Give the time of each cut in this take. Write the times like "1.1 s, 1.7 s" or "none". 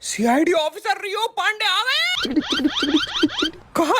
2.2 s